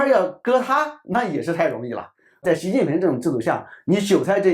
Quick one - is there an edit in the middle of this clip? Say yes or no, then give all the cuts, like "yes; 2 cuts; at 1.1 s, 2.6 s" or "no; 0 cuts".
yes; 1 cut; at 2.4 s